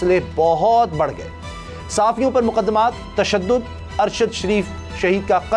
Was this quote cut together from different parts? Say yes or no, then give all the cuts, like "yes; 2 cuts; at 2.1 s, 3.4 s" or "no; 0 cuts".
no; 0 cuts